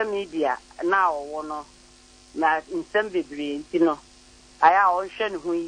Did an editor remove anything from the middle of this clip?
no; 0 cuts

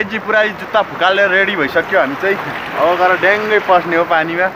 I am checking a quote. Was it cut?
no; 0 cuts

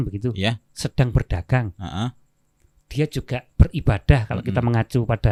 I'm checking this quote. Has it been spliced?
no; 0 cuts

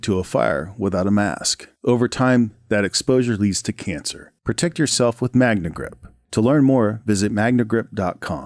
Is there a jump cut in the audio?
no; 0 cuts

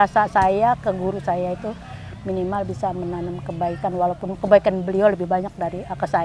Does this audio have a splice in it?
no; 0 cuts

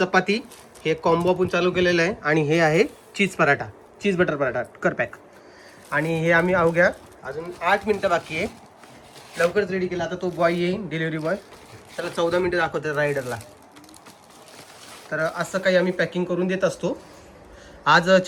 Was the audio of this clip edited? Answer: no; 0 cuts

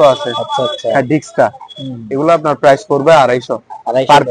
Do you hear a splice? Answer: no; 0 cuts

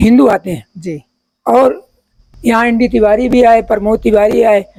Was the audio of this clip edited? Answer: no; 0 cuts

